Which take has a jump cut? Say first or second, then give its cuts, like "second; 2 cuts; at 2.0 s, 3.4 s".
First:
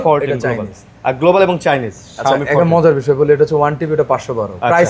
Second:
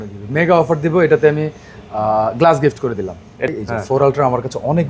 second; 1 cut; at 3.5 s